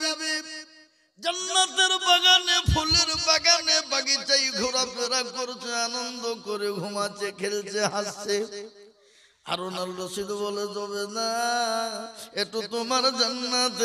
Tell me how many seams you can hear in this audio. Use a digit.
0